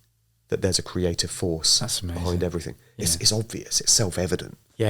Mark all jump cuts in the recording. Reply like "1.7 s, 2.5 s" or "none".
none